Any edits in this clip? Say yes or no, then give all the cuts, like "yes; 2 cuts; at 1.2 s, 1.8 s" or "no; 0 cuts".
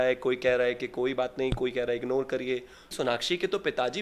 yes; 1 cut; at 2.9 s